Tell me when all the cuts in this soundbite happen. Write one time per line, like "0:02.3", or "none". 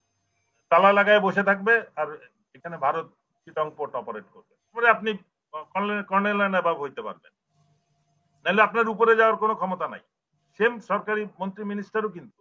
0:04.7